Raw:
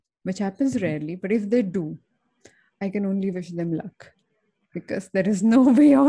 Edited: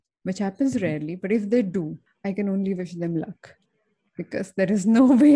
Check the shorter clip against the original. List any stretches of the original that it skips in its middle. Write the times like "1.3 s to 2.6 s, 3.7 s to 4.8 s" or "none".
2.0 s to 2.6 s